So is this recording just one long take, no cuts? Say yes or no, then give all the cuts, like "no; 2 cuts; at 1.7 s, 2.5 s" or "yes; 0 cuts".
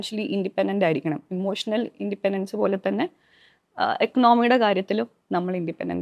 yes; 0 cuts